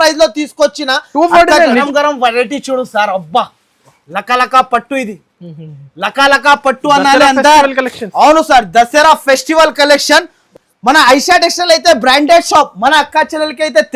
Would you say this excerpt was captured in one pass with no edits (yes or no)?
no